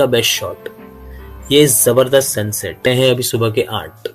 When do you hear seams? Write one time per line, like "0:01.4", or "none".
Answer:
0:02.9